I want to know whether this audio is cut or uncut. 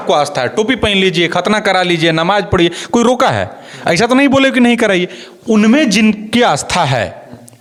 uncut